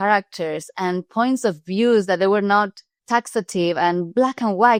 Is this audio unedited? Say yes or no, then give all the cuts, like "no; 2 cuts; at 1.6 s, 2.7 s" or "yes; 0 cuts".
yes; 0 cuts